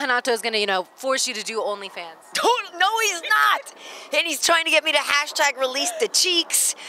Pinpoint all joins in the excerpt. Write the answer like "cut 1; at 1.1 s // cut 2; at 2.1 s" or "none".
none